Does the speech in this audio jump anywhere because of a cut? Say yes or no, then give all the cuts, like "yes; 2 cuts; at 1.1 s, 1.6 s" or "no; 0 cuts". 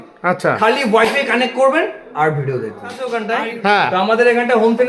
yes; 1 cut; at 3.1 s